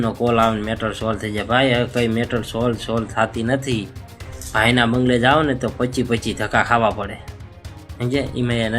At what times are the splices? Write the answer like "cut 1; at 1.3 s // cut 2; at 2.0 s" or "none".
none